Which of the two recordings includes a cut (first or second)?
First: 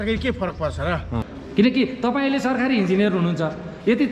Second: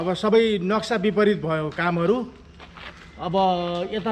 first